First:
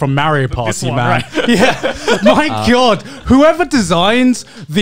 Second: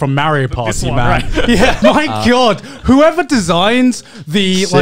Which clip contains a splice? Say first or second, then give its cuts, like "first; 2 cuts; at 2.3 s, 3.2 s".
second; 1 cut; at 1.8 s